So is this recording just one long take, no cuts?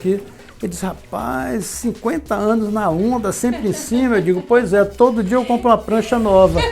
yes; 0 cuts

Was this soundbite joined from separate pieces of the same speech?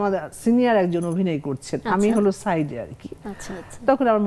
no; 0 cuts

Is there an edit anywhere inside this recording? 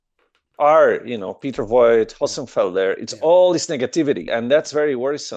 yes; 1 cut; at 4.3 s

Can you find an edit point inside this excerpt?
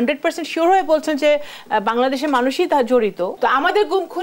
yes; 1 cut; at 3.3 s

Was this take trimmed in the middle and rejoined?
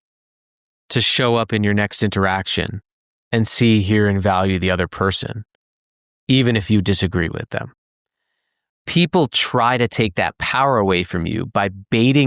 no; 0 cuts

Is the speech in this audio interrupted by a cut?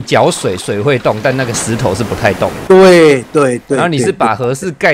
no; 0 cuts

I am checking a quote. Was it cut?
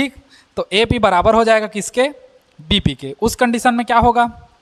no; 0 cuts

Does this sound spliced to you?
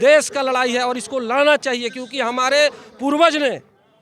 no; 0 cuts

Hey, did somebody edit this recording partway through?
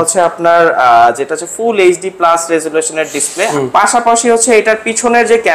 yes; 1 cut; at 3.5 s

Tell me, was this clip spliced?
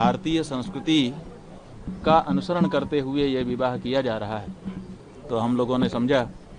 no; 0 cuts

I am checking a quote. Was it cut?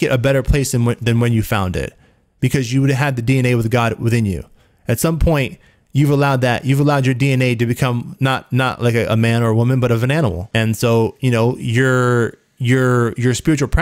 yes; 1 cut; at 10.4 s

